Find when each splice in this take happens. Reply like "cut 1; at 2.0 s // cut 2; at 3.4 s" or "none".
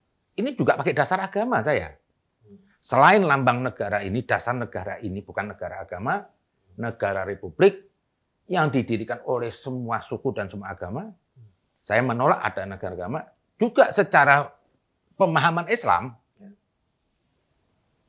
none